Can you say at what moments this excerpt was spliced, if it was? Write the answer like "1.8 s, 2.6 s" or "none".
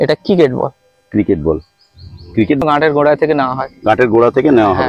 2.6 s